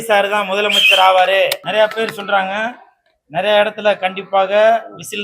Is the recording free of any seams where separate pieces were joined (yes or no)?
no